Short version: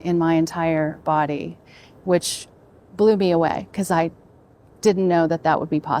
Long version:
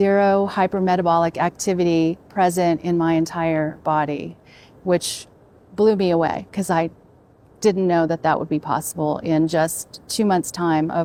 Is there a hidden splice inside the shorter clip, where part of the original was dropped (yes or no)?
no